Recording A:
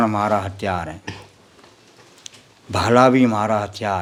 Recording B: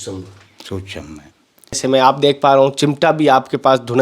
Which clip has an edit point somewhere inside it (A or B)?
B